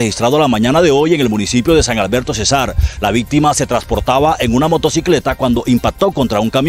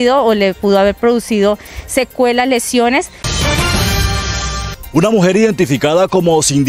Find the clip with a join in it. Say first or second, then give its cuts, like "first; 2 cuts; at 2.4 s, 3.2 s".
second; 2 cuts; at 3.2 s, 4.7 s